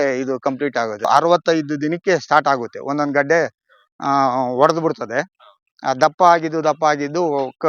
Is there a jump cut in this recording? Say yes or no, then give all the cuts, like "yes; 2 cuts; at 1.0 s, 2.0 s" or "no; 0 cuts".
yes; 1 cut; at 1.0 s